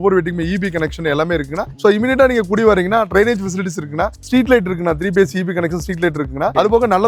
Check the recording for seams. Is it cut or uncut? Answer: uncut